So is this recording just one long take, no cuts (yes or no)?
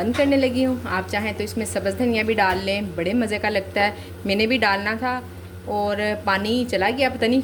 yes